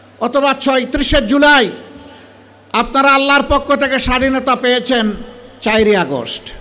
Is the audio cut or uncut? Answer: uncut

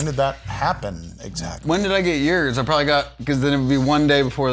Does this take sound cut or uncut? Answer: uncut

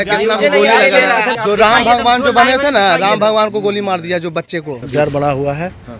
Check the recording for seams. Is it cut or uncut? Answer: cut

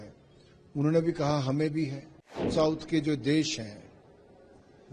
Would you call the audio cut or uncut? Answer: cut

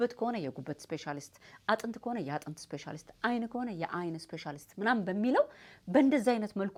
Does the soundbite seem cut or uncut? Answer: uncut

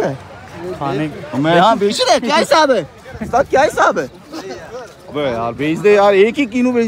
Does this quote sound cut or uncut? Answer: uncut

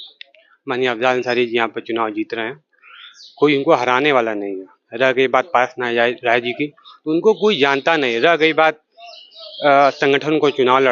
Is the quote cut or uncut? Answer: uncut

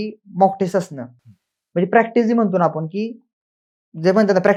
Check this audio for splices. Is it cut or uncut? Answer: uncut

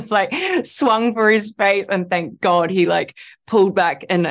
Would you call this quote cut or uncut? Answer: uncut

